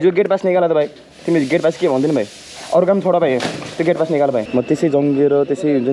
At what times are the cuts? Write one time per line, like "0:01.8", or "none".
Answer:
0:04.5

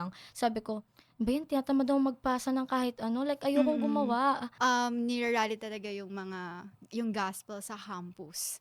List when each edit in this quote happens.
0:04.5

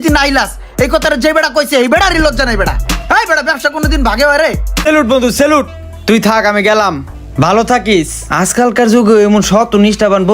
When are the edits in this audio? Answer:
0:04.8

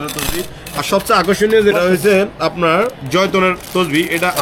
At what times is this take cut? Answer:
0:01.7

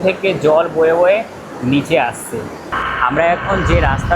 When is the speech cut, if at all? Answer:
0:02.6

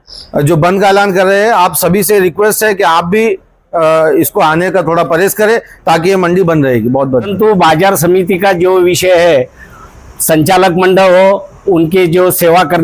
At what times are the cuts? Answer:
0:07.3

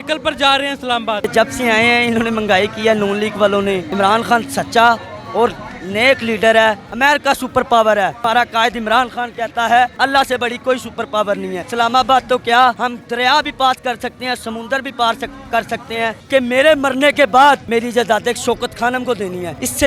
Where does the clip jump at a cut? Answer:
0:01.2
0:03.9
0:06.9
0:11.7
0:16.2
0:17.6

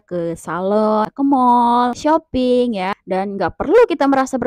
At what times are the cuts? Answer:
0:01.1
0:02.0
0:03.0

